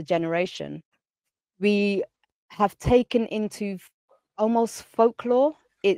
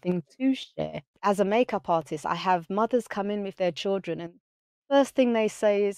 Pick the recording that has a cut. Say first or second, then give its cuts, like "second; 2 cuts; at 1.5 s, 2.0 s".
second; 1 cut; at 1.0 s